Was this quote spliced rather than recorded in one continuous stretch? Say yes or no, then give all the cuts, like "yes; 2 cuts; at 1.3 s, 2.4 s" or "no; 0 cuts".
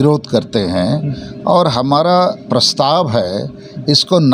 no; 0 cuts